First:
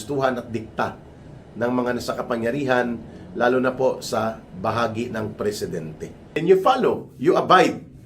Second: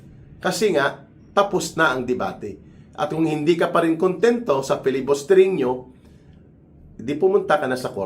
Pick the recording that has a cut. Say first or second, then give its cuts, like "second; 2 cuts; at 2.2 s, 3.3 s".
first; 1 cut; at 6.4 s